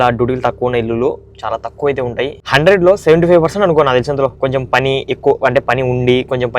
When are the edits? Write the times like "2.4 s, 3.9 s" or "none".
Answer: 2.4 s